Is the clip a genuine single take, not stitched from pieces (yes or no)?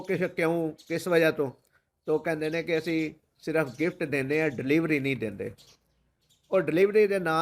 yes